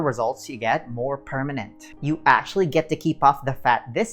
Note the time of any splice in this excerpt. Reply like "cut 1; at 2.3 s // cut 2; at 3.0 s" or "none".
cut 1; at 1.8 s